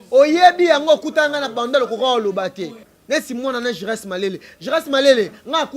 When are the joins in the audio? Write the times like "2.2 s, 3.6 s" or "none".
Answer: 2.9 s